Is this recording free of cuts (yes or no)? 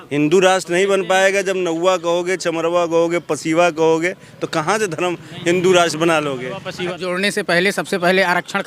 no